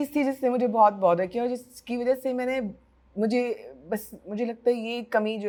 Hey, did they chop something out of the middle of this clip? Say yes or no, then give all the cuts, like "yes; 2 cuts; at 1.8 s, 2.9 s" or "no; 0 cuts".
no; 0 cuts